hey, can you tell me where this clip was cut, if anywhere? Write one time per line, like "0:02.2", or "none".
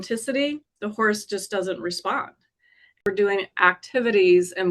0:03.0